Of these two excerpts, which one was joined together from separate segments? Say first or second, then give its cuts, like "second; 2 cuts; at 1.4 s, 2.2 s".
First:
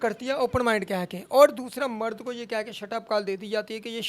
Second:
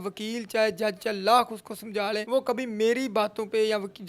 second; 1 cut; at 2.2 s